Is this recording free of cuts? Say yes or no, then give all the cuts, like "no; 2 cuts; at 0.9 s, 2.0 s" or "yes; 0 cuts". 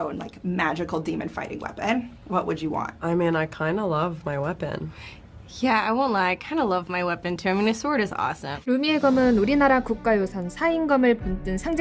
yes; 0 cuts